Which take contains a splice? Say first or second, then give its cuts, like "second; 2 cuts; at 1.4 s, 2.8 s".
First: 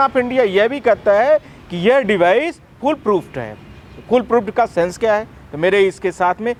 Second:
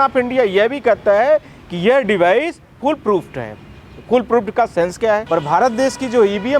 second; 1 cut; at 5.2 s